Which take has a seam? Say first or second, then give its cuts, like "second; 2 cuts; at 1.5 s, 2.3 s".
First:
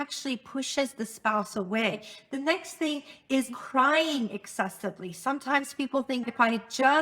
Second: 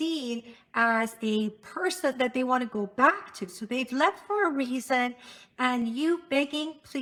first; 3 cuts; at 2.1 s, 3.5 s, 6.2 s